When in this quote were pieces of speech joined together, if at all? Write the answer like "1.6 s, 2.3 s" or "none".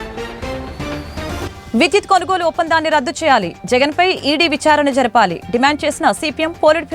1.3 s